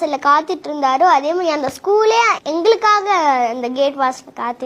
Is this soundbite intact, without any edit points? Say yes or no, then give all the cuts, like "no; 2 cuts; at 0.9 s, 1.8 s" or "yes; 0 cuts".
yes; 0 cuts